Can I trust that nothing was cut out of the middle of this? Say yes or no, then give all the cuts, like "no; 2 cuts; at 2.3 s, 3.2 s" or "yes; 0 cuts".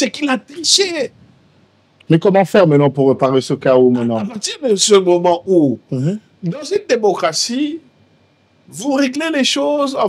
yes; 0 cuts